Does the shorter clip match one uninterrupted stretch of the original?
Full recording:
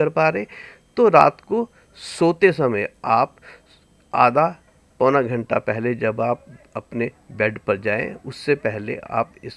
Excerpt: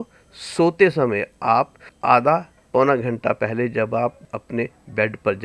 no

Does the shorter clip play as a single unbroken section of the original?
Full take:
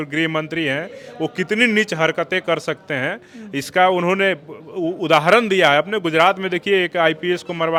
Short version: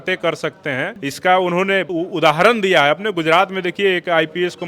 no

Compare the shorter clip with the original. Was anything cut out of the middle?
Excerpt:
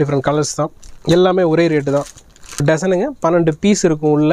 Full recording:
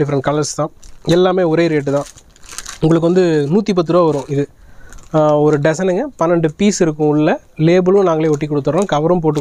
yes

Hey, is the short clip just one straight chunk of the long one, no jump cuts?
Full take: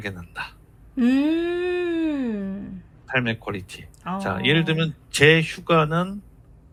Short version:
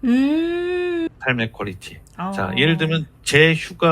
no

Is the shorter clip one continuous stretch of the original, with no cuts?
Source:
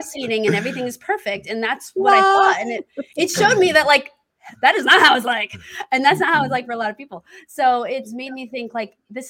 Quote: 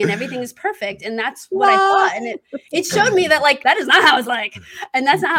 no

